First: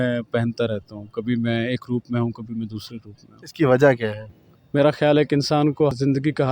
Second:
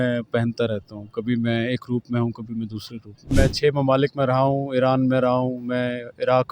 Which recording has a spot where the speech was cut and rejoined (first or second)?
second